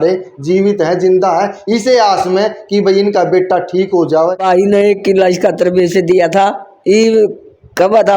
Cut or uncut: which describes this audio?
cut